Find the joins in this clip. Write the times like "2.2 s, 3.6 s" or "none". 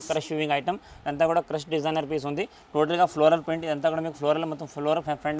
none